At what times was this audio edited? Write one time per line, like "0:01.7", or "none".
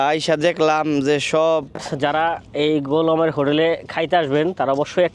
0:01.9